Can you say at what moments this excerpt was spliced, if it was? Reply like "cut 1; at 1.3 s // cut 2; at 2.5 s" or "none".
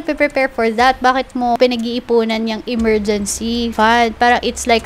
cut 1; at 1.6 s // cut 2; at 3.7 s